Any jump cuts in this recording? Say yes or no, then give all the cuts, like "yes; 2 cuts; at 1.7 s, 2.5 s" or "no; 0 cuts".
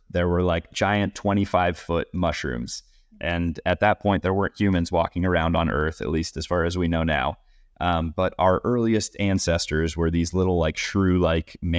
no; 0 cuts